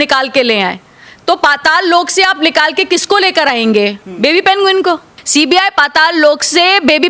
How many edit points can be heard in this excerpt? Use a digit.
0